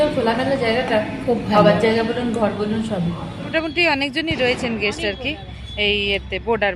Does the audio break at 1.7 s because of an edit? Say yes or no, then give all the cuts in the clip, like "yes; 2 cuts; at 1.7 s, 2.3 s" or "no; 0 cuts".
no; 1 cut; at 3.5 s